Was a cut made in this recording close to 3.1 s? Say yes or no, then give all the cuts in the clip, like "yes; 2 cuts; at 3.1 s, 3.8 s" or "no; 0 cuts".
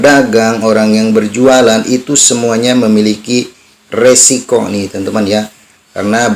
no; 0 cuts